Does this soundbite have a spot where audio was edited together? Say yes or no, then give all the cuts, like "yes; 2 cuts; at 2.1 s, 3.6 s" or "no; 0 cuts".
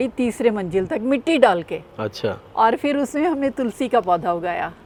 no; 0 cuts